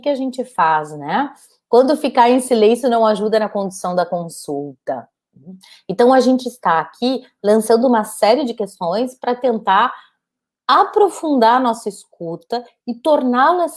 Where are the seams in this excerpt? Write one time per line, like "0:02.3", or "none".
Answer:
none